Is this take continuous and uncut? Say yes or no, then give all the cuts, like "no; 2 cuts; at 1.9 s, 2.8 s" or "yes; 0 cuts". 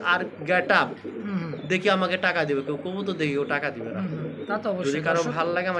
yes; 0 cuts